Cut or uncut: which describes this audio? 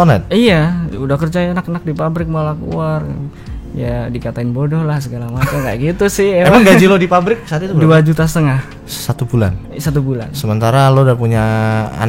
uncut